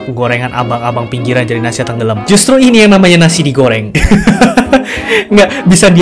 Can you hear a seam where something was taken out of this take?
yes; 2 cuts; at 2.2 s, 3.9 s

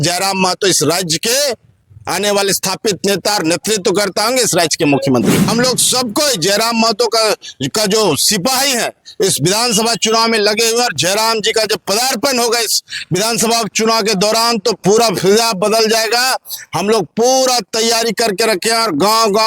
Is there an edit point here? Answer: yes; 1 cut; at 5.5 s

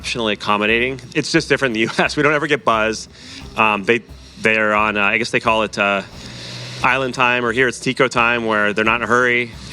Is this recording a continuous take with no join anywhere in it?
no; 1 cut; at 1.0 s

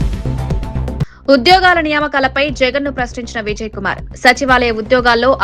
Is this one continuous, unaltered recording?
no; 1 cut; at 1.1 s

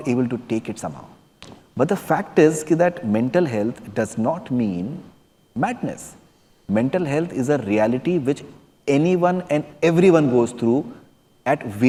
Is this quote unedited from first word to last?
yes; 0 cuts

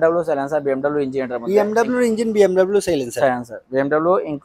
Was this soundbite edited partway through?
no; 0 cuts

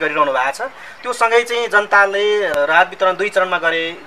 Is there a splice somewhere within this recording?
yes; 1 cut; at 2.5 s

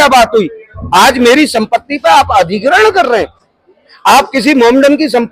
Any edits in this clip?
no; 0 cuts

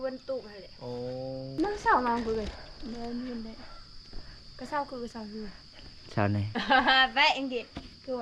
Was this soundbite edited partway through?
yes; 1 cut; at 1.5 s

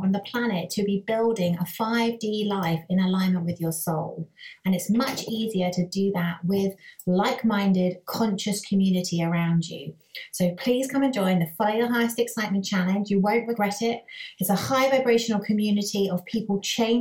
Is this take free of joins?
yes; 0 cuts

